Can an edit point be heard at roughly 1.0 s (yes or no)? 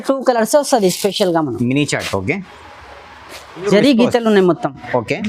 no